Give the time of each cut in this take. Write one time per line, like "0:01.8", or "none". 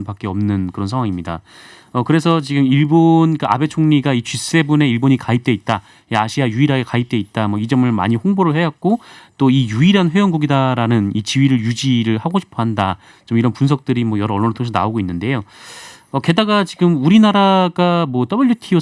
none